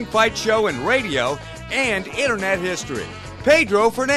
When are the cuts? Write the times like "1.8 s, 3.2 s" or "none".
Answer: 3.3 s